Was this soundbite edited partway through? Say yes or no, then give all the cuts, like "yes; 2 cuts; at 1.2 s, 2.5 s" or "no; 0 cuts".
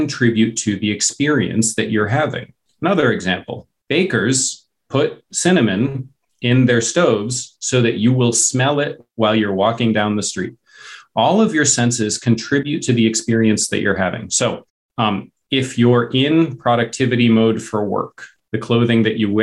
yes; 1 cut; at 12.7 s